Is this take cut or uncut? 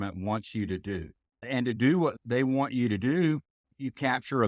cut